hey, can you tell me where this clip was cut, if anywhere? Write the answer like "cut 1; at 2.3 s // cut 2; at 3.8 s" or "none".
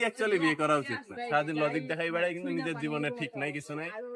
cut 1; at 1.1 s